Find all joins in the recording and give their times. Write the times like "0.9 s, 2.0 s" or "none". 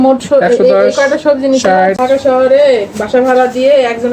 2.0 s